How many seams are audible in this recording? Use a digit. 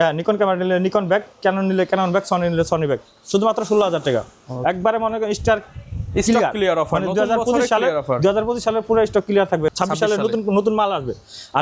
0